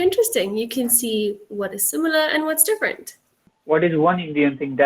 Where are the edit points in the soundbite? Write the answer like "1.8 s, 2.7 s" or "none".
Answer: 3.5 s